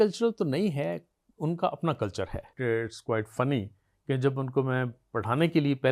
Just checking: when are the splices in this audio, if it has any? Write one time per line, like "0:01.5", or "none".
0:02.5